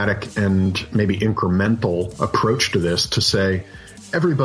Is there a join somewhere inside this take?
no; 0 cuts

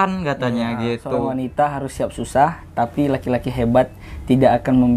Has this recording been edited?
yes; 1 cut; at 1.4 s

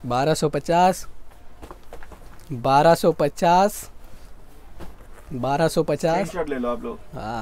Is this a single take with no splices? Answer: yes; 0 cuts

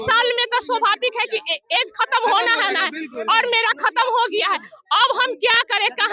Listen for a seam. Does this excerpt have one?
no; 0 cuts

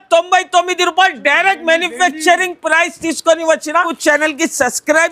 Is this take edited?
yes; 1 cut; at 3.9 s

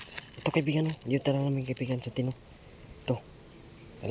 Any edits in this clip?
no; 0 cuts

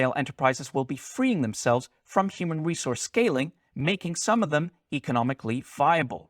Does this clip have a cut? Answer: yes; 1 cut; at 3.6 s

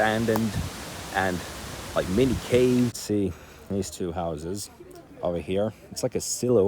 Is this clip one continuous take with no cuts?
no; 1 cut; at 3.0 s

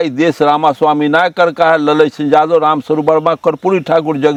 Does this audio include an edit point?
no; 0 cuts

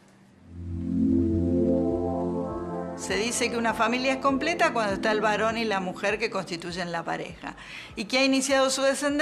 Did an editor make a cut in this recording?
no; 0 cuts

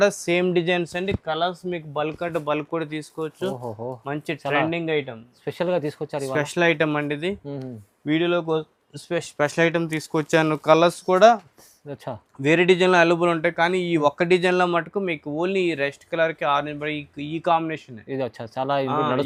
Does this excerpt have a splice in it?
no; 0 cuts

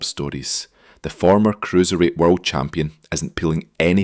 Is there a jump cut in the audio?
yes; 1 cut; at 2.9 s

